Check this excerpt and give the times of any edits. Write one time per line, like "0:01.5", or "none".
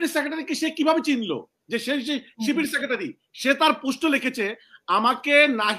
none